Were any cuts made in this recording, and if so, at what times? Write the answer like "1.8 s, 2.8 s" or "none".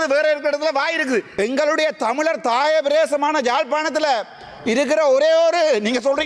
1.3 s